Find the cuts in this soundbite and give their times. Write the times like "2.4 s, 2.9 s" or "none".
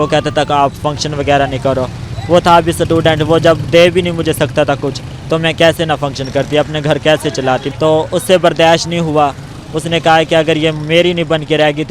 7.7 s